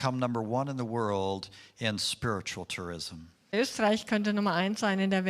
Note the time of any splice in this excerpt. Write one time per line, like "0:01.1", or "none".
0:03.4